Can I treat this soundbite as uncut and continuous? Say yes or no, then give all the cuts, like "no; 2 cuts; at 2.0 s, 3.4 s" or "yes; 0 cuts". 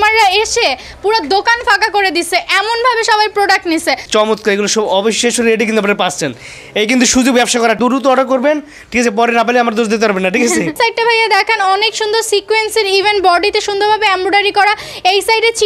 no; 3 cuts; at 4.0 s, 7.8 s, 10.7 s